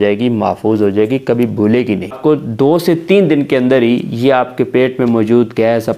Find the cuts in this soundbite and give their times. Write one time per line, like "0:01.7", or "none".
0:02.1